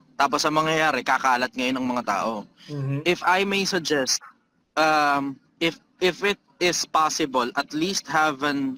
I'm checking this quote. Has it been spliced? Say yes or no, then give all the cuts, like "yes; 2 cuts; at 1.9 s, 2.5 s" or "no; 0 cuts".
no; 0 cuts